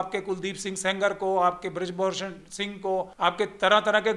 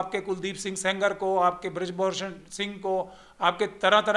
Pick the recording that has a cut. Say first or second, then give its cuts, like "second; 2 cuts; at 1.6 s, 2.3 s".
first; 1 cut; at 3.1 s